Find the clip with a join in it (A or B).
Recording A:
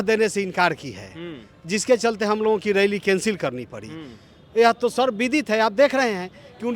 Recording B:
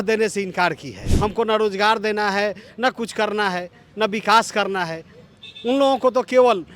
B